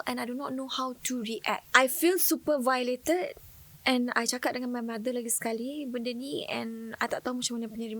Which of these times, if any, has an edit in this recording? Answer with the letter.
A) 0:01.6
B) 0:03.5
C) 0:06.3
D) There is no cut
A